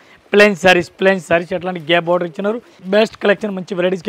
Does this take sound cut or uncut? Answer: uncut